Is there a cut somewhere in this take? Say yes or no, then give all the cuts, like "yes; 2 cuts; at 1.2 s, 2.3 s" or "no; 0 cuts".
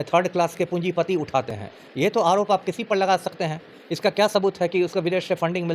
no; 0 cuts